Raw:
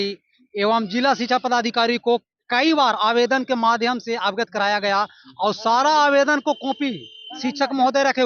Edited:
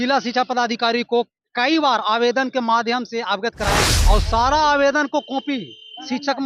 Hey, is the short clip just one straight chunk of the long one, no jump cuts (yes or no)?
no